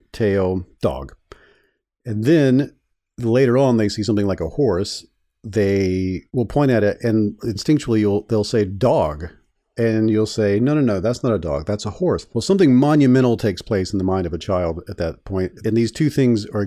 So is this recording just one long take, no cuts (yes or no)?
no